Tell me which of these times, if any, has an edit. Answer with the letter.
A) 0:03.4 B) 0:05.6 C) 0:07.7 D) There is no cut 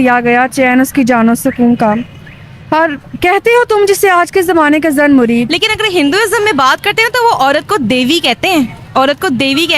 B